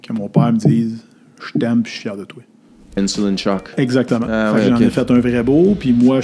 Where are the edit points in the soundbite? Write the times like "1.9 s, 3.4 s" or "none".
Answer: 3.0 s